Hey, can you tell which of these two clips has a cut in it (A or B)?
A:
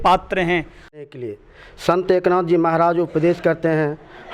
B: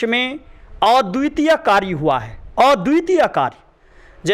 A